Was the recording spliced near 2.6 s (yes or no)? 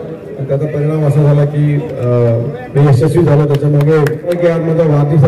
no